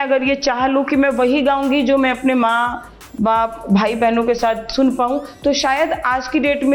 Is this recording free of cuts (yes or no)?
yes